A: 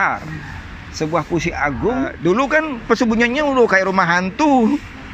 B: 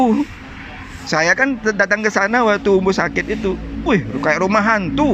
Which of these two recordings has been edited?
A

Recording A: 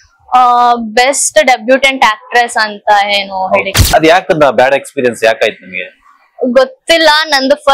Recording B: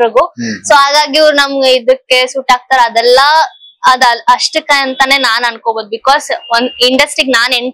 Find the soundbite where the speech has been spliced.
A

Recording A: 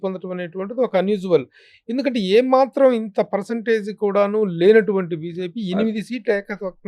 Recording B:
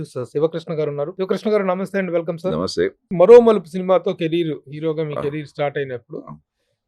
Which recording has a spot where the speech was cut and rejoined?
B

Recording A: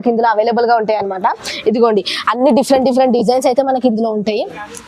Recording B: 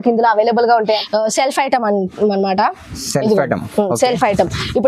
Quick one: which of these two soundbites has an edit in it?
B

